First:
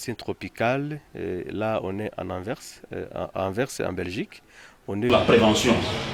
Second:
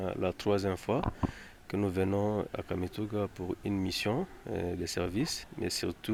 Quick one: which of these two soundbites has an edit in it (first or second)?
first